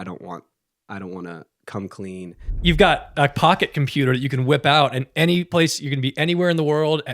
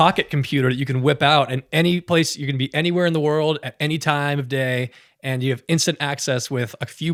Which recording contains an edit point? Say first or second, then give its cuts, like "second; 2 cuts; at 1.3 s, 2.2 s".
first; 1 cut; at 2.5 s